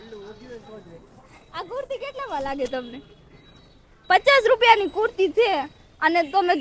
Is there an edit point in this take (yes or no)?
no